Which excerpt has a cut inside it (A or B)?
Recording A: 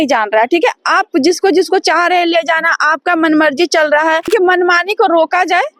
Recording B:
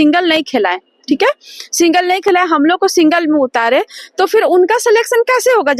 A